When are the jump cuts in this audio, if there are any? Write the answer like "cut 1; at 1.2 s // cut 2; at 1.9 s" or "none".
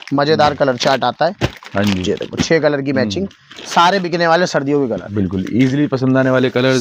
none